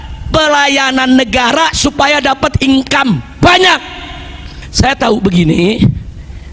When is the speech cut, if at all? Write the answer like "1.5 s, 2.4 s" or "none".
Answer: 4.6 s